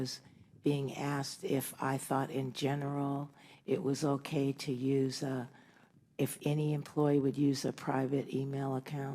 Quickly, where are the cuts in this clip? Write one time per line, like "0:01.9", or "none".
0:07.4